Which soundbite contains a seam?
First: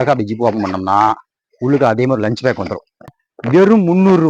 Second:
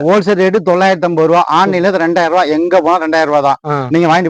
first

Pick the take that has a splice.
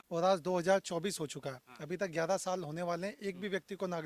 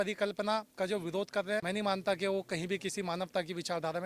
second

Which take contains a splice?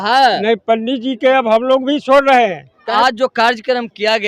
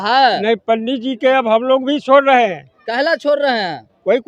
first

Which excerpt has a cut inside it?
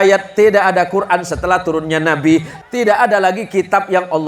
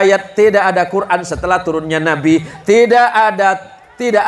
first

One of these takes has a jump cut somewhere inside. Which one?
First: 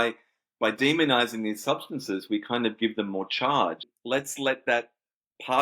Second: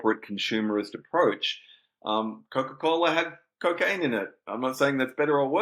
first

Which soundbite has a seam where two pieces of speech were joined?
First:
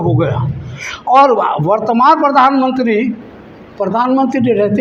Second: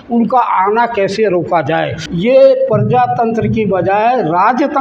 second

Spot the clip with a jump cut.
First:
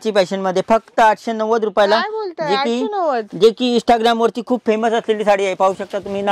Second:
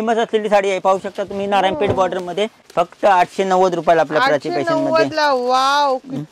second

